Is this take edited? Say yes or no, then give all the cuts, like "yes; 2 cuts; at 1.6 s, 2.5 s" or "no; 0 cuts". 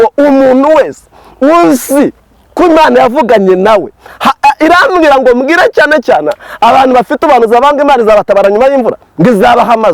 no; 0 cuts